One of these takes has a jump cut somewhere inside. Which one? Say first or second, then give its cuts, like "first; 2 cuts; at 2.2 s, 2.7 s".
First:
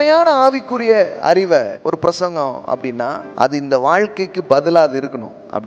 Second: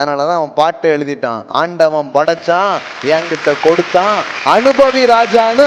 first; 2 cuts; at 1.8 s, 3.2 s